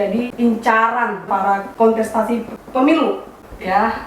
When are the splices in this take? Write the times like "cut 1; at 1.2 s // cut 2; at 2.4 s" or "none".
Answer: cut 1; at 1.3 s